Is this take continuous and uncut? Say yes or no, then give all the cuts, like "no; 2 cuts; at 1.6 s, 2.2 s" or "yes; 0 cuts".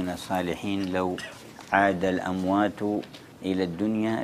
no; 1 cut; at 3.2 s